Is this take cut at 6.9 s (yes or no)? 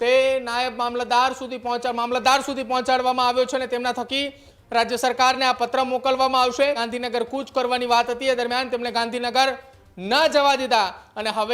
yes